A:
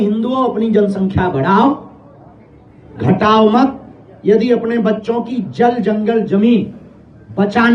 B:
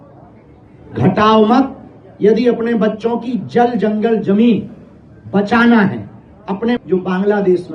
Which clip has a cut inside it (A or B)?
B